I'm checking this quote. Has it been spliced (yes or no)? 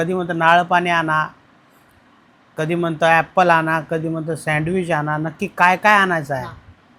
no